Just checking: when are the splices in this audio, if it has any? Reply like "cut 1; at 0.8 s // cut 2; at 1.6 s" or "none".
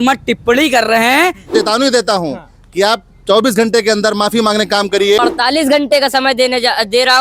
cut 1; at 1.5 s // cut 2; at 5.2 s